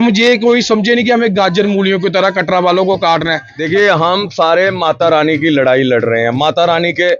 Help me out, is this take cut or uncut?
cut